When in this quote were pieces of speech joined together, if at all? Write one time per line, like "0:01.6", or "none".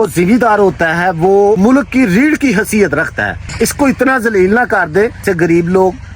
0:01.6
0:03.5
0:05.2